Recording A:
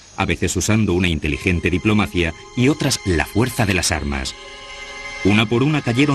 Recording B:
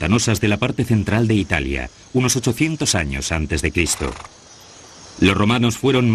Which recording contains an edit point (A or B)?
B